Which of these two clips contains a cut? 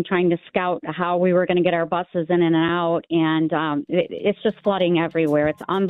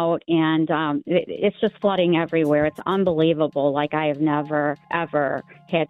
second; 1 cut; at 4.9 s

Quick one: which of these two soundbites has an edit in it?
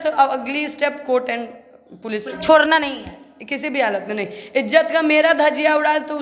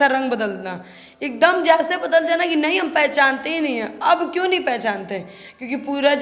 first; 1 cut; at 2.4 s

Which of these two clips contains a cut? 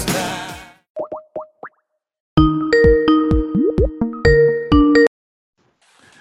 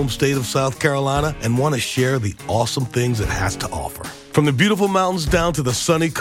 first; 1 cut; at 0.9 s

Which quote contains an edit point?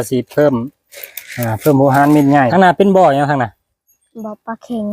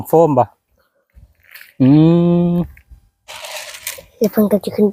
first; 1 cut; at 2.5 s

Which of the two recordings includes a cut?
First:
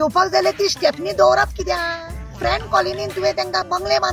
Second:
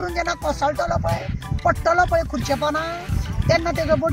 first; 1 cut; at 2.4 s

